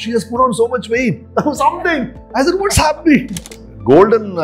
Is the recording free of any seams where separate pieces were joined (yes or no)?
no